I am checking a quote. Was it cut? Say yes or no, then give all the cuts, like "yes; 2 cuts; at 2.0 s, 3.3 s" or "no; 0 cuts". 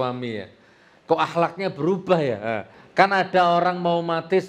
yes; 1 cut; at 2.8 s